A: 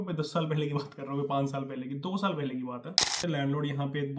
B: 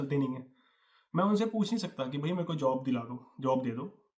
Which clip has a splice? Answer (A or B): A